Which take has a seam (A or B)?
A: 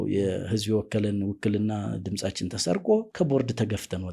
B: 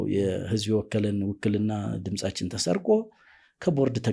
A